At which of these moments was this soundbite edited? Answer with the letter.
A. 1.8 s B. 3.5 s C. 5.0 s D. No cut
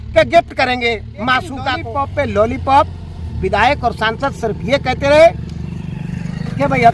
A